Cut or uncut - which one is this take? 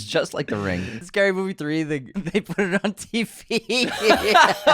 cut